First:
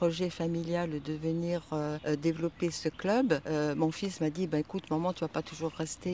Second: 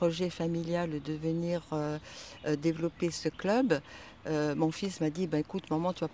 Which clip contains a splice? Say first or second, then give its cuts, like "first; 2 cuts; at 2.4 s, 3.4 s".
first; 2 cuts; at 2.0 s, 3.4 s